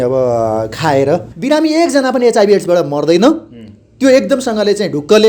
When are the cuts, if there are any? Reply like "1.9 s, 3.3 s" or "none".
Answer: 1.3 s